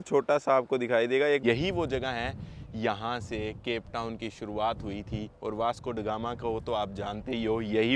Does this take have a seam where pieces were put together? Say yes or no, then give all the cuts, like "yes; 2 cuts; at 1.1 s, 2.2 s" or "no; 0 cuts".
yes; 1 cut; at 1.4 s